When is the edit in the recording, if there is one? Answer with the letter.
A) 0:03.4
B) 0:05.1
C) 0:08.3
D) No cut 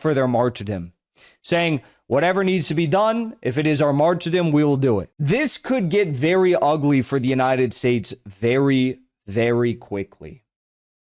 B